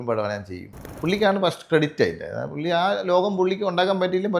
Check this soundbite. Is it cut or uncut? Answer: cut